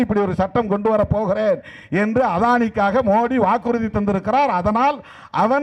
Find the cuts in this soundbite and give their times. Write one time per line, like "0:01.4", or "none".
none